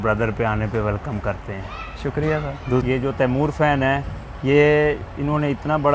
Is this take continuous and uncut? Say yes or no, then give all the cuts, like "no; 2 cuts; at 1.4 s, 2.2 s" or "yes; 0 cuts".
no; 1 cut; at 2.8 s